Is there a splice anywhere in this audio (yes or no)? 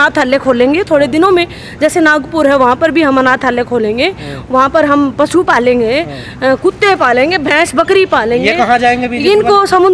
no